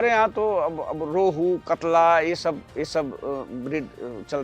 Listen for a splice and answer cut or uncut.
uncut